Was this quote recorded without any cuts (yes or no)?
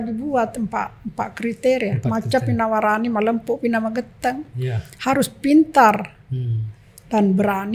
yes